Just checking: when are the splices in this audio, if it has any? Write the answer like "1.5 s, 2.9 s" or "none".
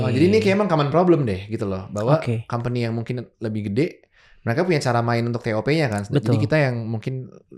none